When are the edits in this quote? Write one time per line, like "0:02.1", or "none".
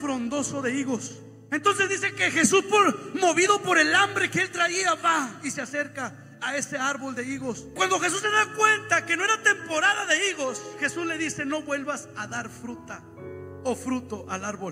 0:07.8